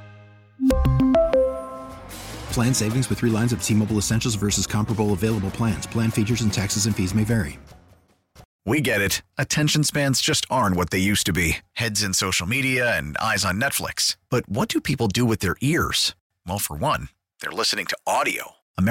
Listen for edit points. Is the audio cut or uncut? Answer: cut